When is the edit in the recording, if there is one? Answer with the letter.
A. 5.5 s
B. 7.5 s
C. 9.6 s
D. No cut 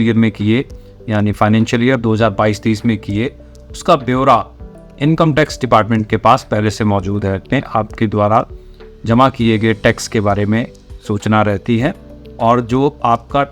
B